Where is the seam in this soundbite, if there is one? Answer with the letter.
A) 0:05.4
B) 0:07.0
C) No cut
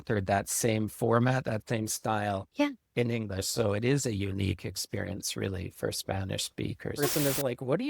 B